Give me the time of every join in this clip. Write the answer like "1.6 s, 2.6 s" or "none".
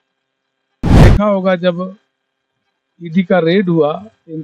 1.0 s